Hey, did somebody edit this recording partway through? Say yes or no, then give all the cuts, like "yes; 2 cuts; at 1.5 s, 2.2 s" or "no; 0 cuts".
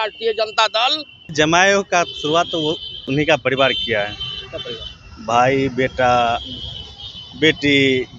yes; 1 cut; at 1.3 s